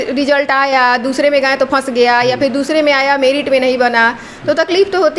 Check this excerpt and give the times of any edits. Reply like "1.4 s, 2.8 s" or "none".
none